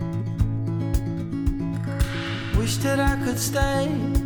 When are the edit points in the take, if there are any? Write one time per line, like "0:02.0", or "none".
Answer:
none